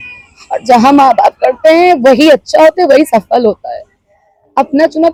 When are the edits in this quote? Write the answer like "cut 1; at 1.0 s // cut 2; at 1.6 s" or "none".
none